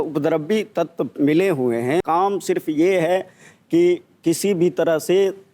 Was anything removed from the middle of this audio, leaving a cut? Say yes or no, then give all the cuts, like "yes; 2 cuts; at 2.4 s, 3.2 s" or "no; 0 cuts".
yes; 1 cut; at 2.0 s